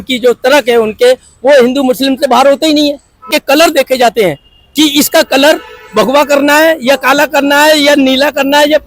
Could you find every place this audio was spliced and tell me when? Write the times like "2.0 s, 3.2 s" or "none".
3.4 s